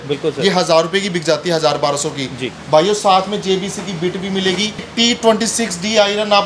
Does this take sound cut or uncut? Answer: cut